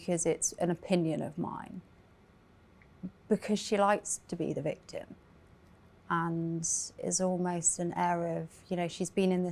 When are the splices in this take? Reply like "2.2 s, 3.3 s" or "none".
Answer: none